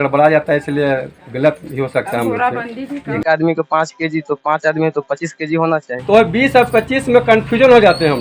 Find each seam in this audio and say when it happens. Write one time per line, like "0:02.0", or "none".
0:03.1
0:05.9